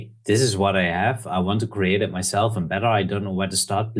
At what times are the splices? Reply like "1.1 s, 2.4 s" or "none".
none

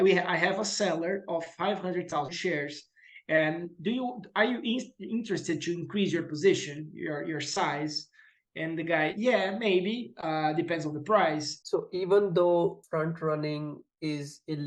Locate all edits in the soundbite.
11.5 s, 12.8 s

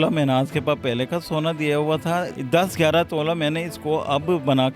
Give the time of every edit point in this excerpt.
2.4 s

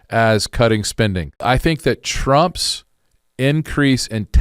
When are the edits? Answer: 1.3 s

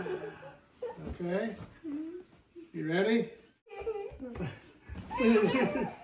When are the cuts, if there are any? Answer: 3.7 s

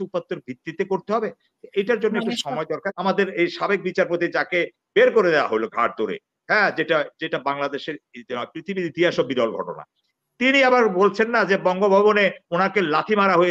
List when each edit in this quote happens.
2.9 s

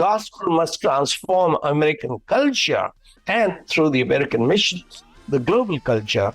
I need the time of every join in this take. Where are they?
3.2 s

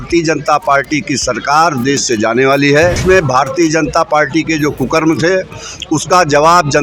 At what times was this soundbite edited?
3.0 s

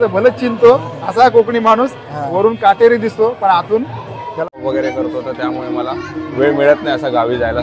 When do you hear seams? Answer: 4.5 s

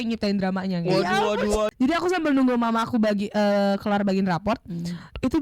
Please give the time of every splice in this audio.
1.7 s

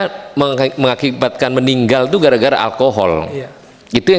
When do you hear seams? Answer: none

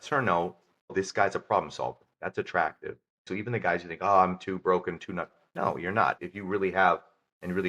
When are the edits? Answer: 0.9 s, 2.1 s, 3.3 s, 6.2 s

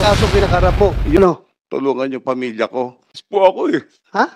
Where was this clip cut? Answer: 1.2 s, 3.1 s

